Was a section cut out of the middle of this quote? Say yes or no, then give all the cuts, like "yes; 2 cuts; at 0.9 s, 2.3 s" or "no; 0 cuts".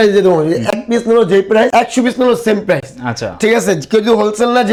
no; 0 cuts